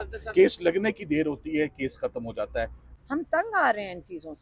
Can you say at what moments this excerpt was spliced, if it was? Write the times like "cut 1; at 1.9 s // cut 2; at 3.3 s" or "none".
cut 1; at 2.8 s